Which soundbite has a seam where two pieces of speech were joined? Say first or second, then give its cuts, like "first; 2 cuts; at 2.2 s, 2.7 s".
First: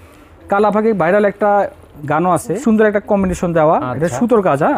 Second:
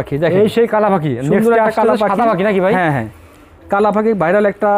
first; 1 cut; at 2.6 s